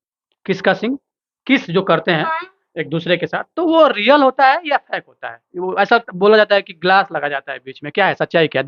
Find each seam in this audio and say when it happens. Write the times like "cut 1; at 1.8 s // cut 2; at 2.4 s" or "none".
none